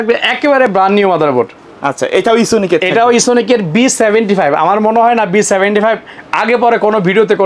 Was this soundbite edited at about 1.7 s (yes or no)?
no